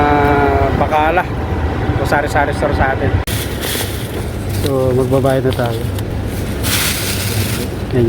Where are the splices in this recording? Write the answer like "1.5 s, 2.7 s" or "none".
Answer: 3.2 s, 6.0 s